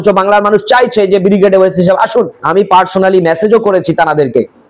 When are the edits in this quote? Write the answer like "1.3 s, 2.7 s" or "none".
2.4 s